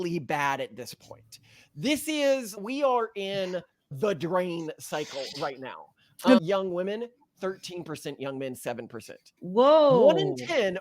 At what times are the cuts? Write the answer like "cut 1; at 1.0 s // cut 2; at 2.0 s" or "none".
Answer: cut 1; at 6.4 s